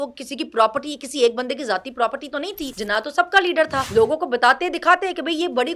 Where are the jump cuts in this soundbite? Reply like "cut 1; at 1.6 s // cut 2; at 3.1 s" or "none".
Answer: cut 1; at 2.7 s // cut 2; at 3.9 s